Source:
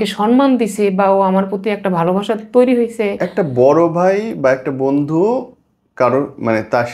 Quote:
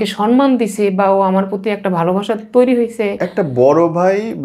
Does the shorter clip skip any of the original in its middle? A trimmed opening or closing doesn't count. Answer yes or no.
no